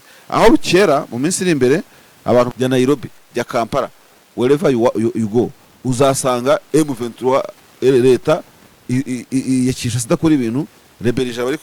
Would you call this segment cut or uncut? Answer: cut